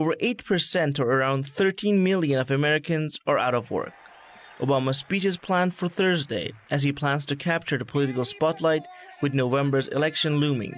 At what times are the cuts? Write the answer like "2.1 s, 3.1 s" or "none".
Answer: none

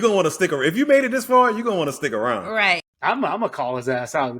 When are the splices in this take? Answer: 2.8 s

